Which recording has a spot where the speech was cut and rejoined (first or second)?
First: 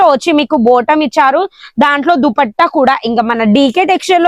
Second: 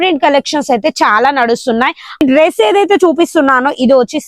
second